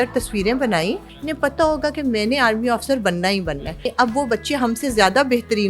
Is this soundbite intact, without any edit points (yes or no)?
no